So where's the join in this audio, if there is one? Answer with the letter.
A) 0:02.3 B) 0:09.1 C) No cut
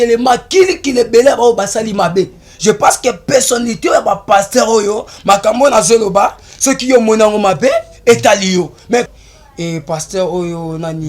B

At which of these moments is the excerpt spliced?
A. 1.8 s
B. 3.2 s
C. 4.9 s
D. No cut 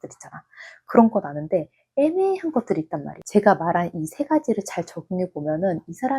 B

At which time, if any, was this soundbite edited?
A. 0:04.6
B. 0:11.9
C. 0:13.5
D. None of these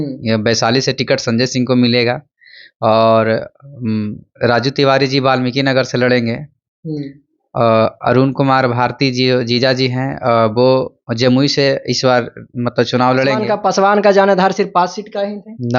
C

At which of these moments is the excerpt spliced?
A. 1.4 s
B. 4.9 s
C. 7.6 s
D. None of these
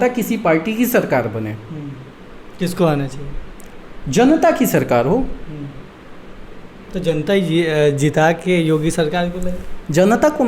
D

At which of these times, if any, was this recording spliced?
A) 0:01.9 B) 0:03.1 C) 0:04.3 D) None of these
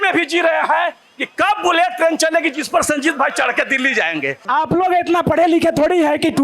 C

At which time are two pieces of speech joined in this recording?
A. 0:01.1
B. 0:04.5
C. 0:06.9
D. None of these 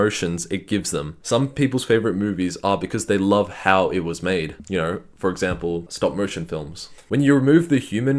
C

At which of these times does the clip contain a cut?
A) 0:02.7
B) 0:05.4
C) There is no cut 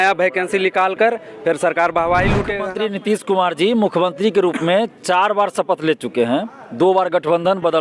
A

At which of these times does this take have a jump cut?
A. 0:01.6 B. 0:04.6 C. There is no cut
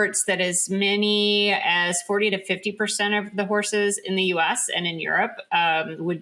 C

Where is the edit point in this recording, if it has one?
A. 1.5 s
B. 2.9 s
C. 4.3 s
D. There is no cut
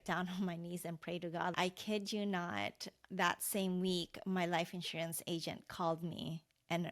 A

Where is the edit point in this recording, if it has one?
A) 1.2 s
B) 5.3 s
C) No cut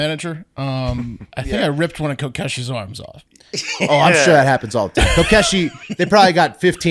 A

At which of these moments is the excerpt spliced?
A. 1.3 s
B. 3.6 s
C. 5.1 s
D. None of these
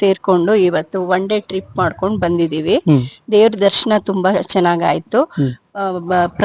D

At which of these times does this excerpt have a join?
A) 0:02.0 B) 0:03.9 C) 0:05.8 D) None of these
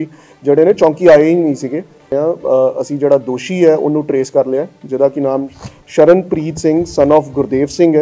A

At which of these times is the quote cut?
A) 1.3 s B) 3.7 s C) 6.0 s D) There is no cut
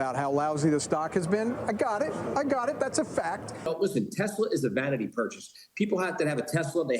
B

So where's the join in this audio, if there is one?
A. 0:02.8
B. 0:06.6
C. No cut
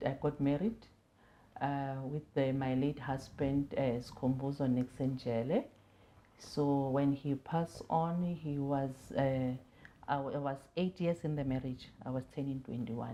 C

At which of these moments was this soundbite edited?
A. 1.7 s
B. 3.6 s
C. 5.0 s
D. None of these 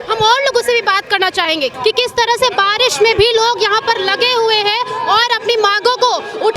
A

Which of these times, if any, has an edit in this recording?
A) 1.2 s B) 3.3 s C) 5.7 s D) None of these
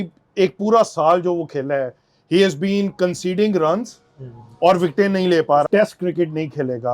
C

